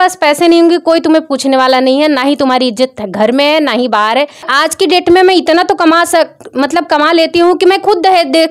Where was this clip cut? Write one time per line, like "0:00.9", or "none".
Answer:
0:04.5

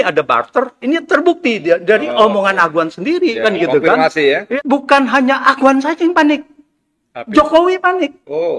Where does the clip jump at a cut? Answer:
0:04.5

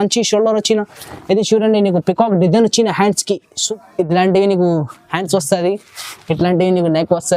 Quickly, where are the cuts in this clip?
0:03.5

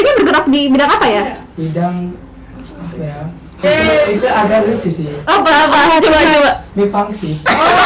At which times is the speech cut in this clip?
0:03.6

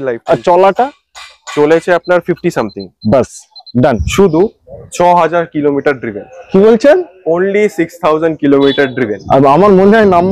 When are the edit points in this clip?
0:04.0

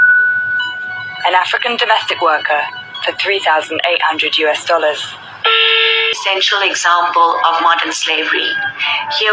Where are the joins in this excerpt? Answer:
0:06.2

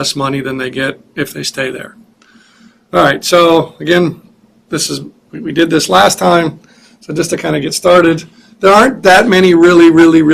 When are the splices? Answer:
0:04.2

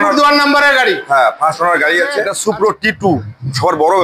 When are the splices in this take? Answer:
0:02.3

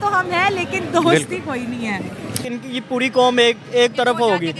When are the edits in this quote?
0:02.4

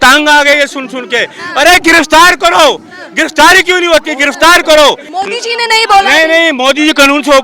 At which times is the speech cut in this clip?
0:05.1

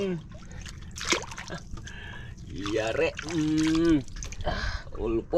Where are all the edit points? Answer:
none

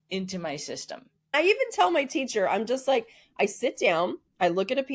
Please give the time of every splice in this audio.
0:01.3

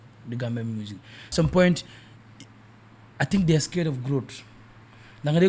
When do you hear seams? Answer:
0:01.3

